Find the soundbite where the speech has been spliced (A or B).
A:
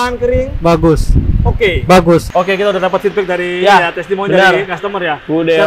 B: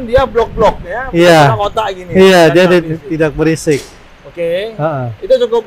A